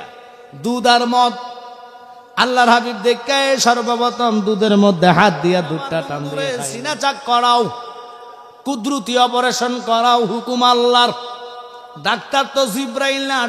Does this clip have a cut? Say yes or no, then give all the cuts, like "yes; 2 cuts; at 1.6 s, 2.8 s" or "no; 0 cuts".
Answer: yes; 1 cut; at 6.3 s